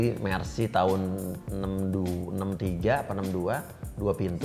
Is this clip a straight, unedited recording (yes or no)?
yes